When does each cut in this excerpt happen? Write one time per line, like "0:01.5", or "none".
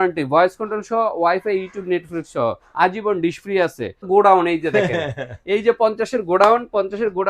0:04.0